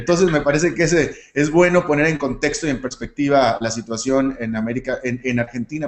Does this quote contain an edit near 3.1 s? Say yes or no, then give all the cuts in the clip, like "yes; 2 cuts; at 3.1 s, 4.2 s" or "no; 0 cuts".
no; 1 cut; at 1.2 s